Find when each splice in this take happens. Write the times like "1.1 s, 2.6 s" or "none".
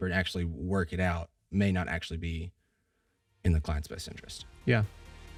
none